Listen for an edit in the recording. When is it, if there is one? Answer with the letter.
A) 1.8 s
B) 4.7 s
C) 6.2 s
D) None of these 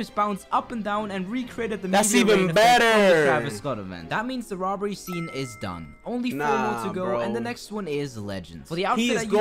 D